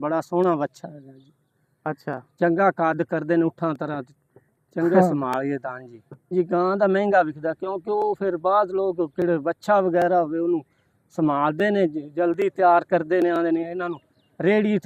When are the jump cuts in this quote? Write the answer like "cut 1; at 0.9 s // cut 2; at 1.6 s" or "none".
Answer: cut 1; at 6.3 s